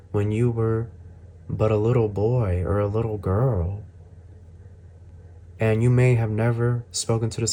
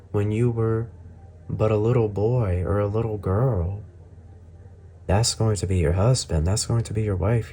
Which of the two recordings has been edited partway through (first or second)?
second